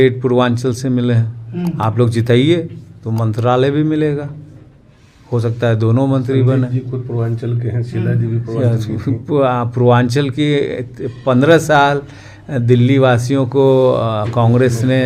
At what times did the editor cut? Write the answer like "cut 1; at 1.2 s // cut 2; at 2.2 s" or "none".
none